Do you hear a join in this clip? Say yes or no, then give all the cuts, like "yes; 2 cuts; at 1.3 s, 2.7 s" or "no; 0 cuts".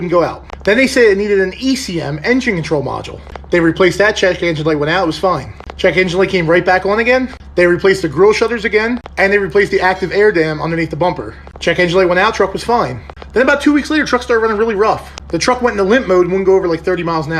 no; 0 cuts